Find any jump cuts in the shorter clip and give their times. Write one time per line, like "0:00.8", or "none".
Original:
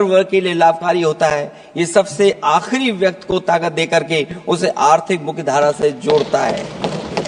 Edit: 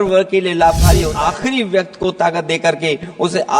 0:01.1